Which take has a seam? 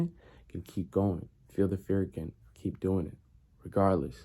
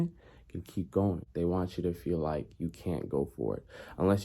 second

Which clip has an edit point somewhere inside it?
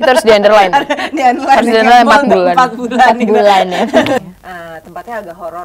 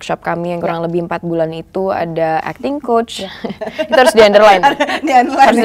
first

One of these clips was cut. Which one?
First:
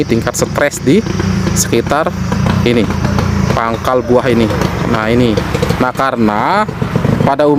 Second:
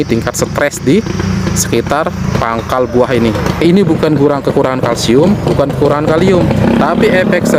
second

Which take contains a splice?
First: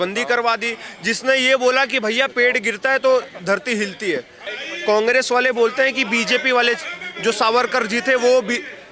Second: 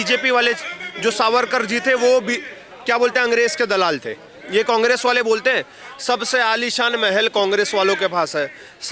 first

